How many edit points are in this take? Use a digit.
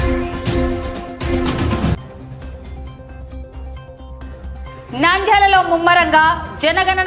2